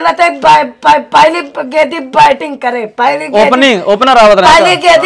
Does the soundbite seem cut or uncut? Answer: uncut